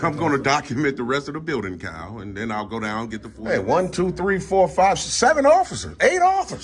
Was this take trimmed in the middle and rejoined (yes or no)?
yes